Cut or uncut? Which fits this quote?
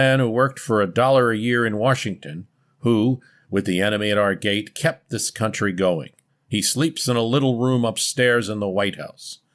uncut